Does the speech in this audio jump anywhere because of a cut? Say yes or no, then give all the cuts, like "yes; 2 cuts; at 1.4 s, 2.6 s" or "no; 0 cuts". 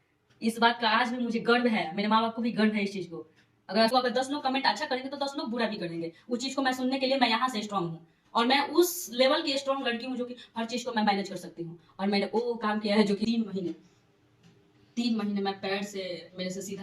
yes; 2 cuts; at 3.9 s, 13.3 s